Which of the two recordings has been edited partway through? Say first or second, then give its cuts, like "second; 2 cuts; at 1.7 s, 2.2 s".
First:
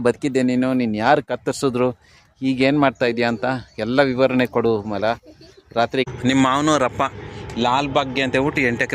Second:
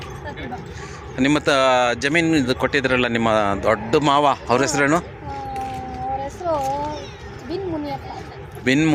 first; 1 cut; at 6.1 s